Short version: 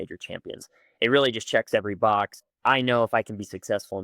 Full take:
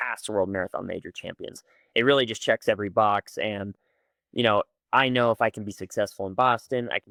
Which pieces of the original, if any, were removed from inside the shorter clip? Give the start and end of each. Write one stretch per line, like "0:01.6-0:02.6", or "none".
0:03.4-0:04.7